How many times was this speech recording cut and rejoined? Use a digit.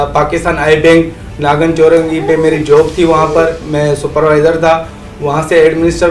0